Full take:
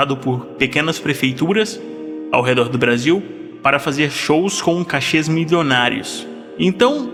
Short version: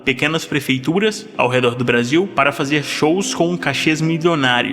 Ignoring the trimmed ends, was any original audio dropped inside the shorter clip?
yes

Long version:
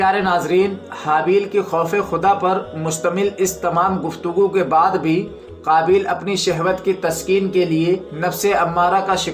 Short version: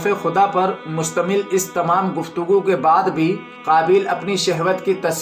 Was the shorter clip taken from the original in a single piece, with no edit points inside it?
no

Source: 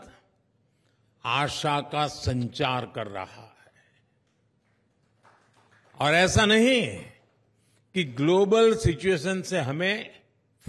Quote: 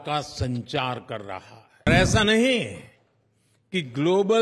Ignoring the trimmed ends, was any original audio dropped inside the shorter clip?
yes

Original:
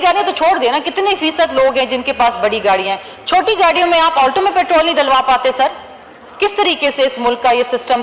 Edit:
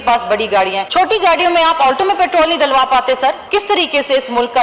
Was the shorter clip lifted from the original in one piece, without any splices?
no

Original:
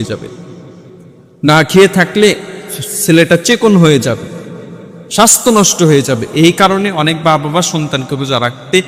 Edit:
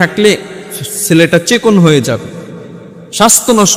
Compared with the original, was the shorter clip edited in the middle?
no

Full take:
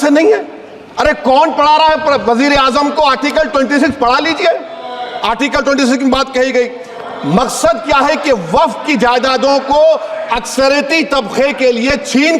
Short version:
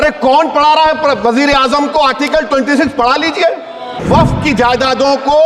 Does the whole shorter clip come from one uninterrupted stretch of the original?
no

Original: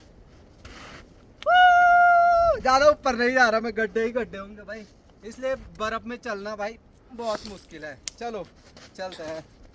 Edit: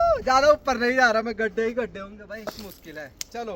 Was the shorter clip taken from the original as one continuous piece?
no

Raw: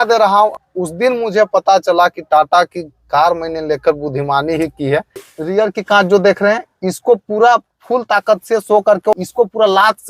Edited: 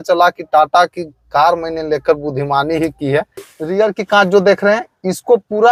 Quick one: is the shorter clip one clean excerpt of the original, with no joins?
yes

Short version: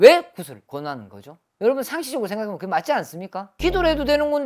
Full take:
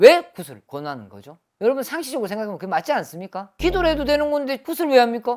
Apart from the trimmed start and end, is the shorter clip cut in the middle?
no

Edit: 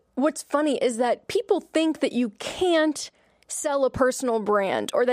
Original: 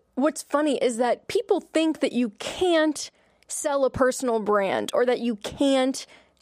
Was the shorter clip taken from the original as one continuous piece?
yes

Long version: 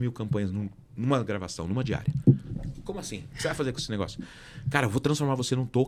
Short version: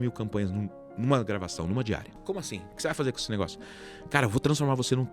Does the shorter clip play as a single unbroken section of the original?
no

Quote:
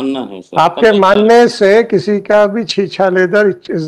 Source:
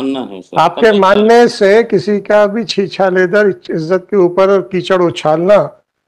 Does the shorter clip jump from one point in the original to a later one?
no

